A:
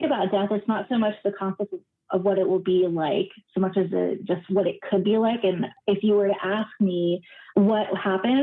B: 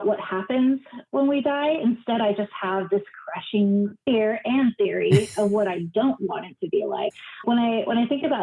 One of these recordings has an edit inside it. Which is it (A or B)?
B